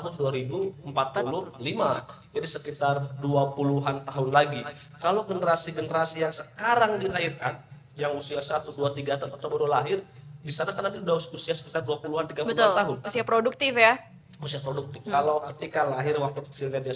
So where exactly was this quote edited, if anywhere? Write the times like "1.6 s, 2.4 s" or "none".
none